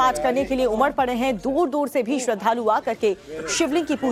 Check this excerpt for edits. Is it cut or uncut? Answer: uncut